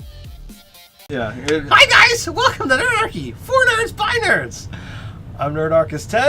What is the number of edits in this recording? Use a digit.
1